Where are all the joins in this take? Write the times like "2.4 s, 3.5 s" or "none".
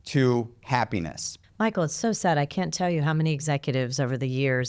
1.2 s